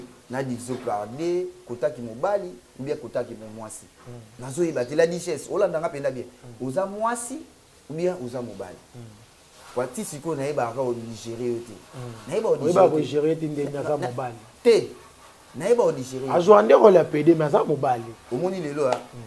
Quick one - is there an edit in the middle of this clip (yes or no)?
no